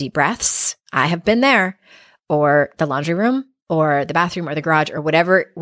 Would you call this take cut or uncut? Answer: uncut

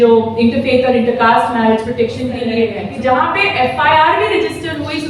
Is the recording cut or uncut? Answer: cut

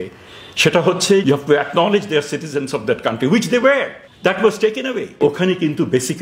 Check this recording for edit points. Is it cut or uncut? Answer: cut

